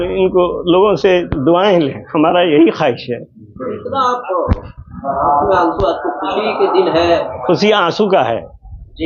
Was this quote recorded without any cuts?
yes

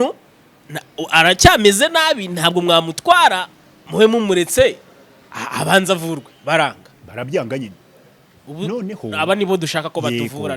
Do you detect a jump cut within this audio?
no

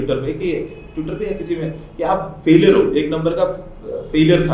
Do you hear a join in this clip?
no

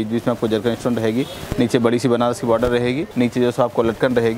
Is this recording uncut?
no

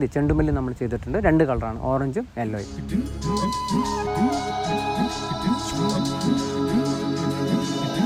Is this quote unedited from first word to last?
yes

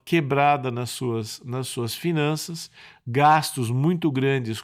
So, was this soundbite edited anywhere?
no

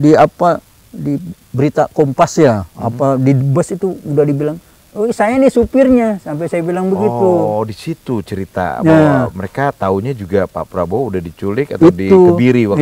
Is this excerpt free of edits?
yes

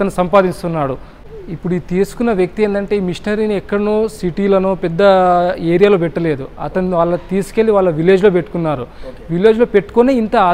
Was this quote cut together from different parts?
no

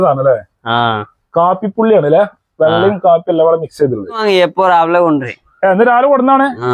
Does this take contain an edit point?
yes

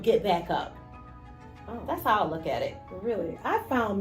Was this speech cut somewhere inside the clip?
yes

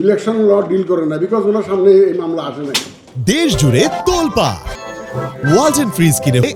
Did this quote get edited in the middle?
no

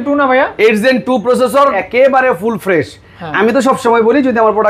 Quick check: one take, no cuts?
no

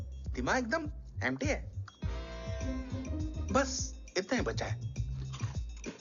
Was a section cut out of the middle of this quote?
no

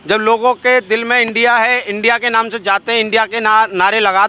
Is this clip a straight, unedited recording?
yes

